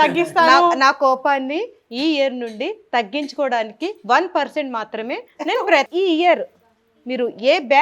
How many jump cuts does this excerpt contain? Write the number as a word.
one